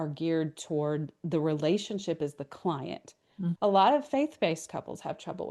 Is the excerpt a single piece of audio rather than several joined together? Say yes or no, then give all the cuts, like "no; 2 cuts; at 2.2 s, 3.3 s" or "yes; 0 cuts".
no; 1 cut; at 3.6 s